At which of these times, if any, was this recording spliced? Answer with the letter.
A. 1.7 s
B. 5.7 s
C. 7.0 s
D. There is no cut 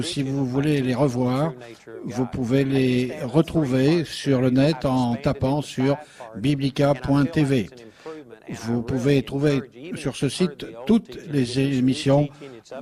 B